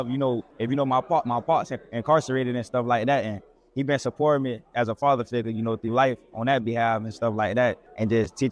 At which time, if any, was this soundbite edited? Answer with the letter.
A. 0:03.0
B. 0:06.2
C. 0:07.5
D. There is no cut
D